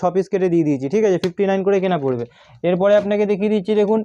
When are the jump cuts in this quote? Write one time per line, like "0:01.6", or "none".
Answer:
none